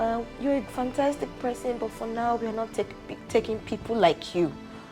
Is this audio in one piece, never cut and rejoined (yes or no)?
yes